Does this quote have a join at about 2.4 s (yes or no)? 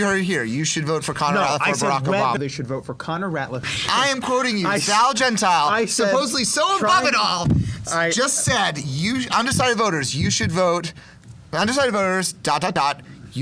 yes